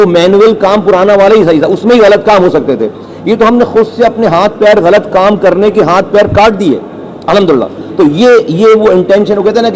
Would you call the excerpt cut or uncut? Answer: uncut